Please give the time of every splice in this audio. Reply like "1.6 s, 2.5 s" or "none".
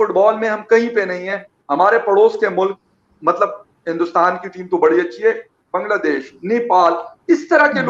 none